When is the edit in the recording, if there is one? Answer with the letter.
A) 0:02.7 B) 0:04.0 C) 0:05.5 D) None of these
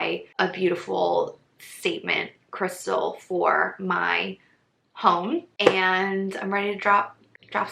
C